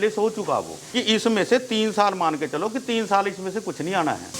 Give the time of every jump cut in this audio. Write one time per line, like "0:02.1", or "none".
0:01.0